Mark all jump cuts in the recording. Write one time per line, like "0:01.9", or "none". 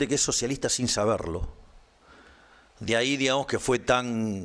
none

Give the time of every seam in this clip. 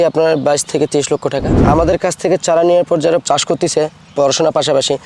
0:01.5
0:03.2

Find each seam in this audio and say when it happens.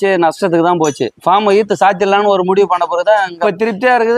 none

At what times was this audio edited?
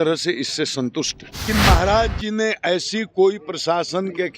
0:01.4

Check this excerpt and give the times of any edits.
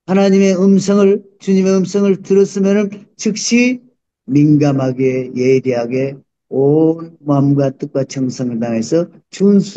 0:04.1

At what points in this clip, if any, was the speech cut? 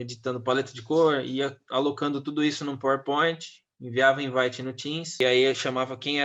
0:05.2

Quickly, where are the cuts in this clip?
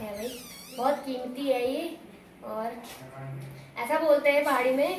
none

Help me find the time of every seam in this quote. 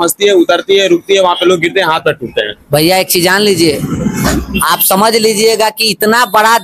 none

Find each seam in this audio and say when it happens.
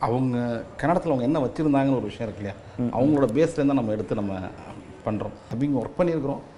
0:05.5

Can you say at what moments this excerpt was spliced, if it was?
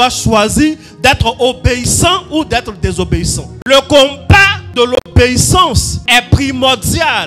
0:03.5
0:04.6
0:05.9

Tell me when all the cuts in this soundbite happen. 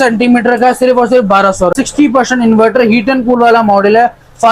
0:01.7

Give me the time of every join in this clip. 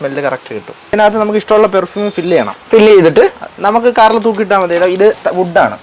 0:01.0

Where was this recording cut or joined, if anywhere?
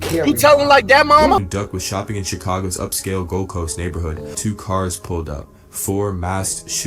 0:01.4
0:04.3

